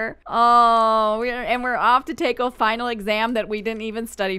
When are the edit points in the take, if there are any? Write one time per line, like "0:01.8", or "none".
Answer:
none

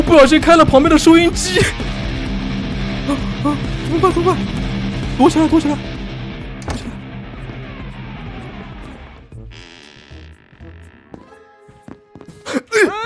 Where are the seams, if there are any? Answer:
0:09.1

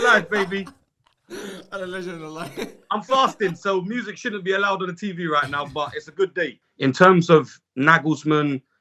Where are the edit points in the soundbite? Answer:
0:06.5

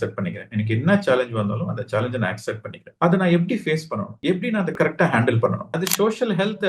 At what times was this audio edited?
0:05.7

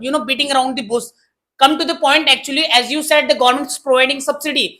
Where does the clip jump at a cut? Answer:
none

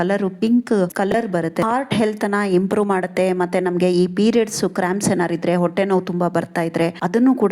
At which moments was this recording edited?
0:01.6

